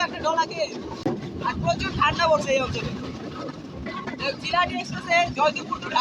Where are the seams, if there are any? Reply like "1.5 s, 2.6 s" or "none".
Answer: 1.0 s